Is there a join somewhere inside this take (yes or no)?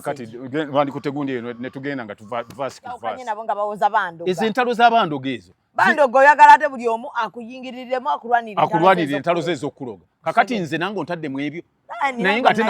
yes